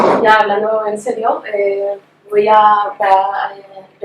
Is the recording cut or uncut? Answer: cut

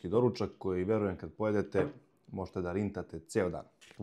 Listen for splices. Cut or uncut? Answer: uncut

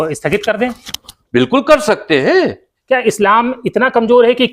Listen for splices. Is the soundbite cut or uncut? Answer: cut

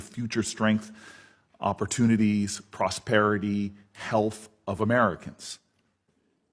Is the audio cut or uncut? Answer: uncut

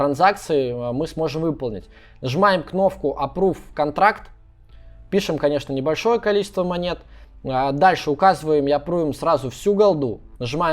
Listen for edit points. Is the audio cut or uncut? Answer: uncut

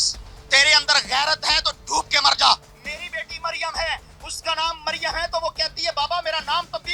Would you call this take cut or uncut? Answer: uncut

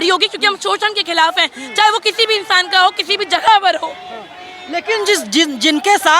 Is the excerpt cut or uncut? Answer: uncut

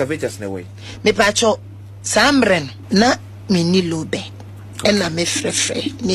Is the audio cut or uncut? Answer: cut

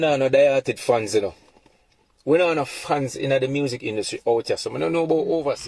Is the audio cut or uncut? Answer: uncut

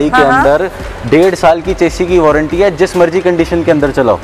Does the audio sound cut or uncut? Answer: uncut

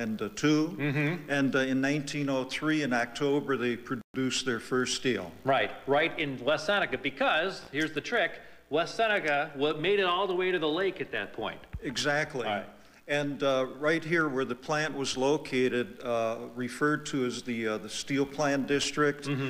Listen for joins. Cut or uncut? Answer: cut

